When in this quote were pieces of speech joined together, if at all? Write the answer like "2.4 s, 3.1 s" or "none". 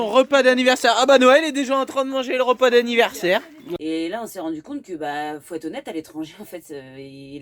3.6 s